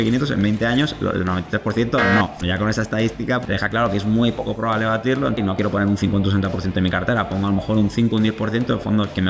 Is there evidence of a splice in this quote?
yes; 3 cuts; at 2.4 s, 3.4 s, 5.4 s

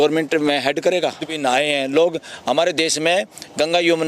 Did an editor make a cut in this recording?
yes; 1 cut; at 1.3 s

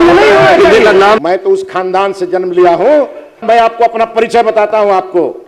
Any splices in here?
yes; 2 cuts; at 1.2 s, 3.4 s

